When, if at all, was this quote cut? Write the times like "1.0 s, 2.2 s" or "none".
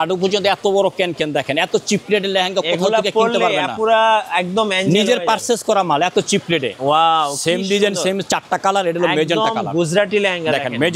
6.8 s